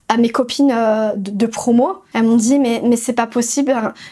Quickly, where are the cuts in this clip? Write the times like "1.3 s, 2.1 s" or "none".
2.0 s